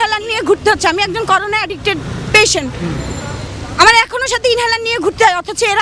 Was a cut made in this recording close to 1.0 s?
no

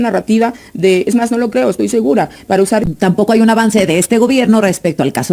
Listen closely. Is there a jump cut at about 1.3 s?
no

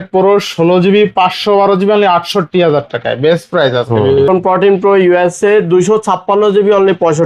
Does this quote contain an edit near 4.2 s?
yes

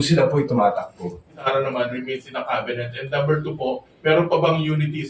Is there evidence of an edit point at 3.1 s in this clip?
no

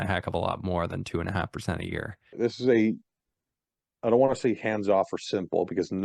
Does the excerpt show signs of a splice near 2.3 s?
yes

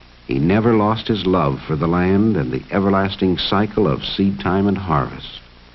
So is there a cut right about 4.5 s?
yes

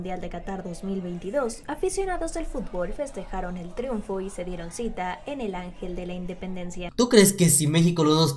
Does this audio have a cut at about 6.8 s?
yes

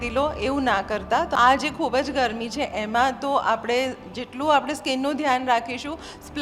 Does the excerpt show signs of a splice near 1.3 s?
yes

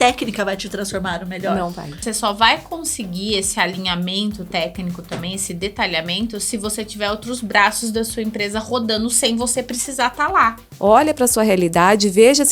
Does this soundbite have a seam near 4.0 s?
no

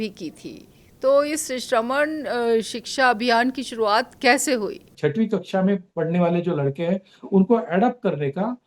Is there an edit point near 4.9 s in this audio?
yes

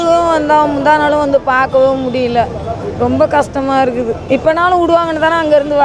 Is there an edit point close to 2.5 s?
no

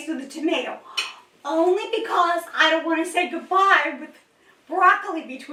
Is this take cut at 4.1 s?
no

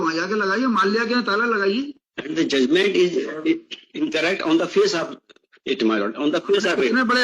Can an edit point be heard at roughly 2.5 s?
no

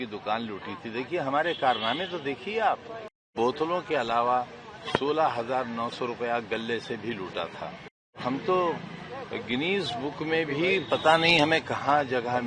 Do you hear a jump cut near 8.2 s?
yes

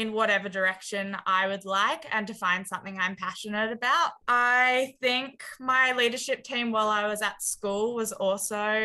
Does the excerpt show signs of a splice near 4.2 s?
yes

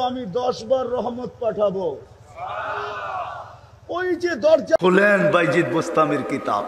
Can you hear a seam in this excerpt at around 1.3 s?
no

